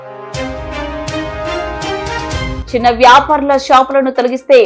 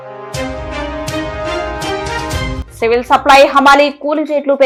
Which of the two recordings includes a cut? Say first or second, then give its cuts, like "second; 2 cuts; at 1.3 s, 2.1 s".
first; 1 cut; at 2.6 s